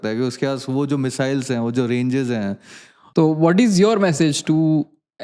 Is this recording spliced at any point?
yes; 1 cut; at 3.0 s

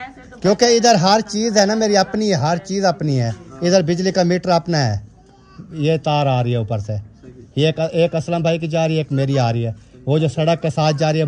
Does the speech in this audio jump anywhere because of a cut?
no; 0 cuts

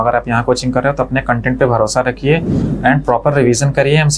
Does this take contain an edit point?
no; 0 cuts

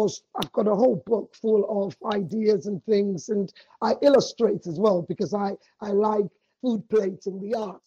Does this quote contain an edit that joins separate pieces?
yes; 1 cut; at 6.4 s

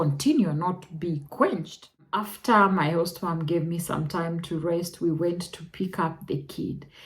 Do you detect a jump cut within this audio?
yes; 1 cut; at 2.3 s

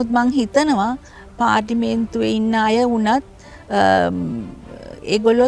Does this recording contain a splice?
no; 0 cuts

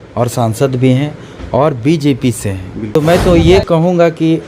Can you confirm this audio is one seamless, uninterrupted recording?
no; 1 cut; at 2.9 s

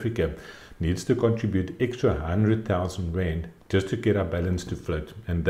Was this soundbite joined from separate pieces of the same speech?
no; 0 cuts

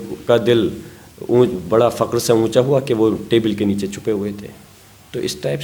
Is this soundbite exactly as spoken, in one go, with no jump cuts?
yes; 0 cuts

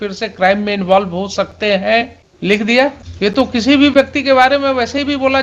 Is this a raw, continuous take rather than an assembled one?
no; 2 cuts; at 2.2 s, 3.1 s

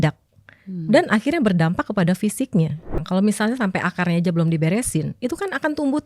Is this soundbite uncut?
no; 1 cut; at 3.0 s

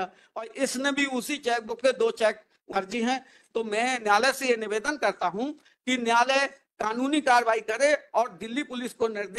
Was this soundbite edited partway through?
yes; 1 cut; at 2.7 s

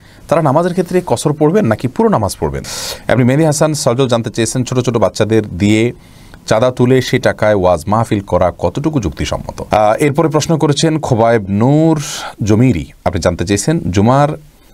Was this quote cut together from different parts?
yes; 2 cuts; at 2.6 s, 9.5 s

